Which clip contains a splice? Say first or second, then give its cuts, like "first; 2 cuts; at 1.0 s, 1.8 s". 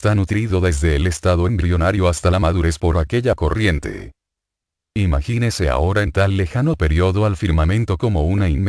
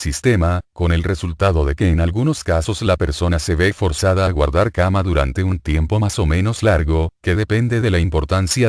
first; 1 cut; at 7.4 s